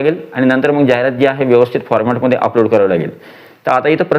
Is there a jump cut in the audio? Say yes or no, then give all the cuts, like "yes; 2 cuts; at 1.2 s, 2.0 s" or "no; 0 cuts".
no; 0 cuts